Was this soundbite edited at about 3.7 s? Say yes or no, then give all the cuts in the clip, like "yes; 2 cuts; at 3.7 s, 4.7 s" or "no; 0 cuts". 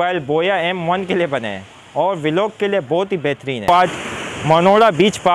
yes; 1 cut; at 3.7 s